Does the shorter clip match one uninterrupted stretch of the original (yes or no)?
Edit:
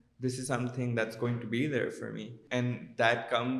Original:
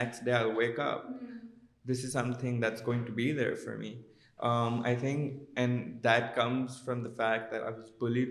no